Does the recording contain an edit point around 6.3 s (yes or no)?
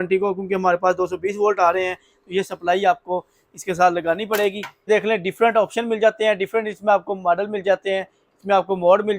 no